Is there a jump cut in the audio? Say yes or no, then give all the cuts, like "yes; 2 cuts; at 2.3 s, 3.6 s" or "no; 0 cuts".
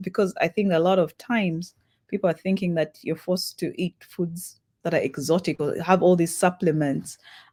no; 0 cuts